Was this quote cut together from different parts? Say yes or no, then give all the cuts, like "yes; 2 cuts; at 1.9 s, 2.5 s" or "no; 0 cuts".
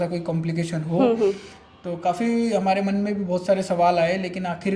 no; 0 cuts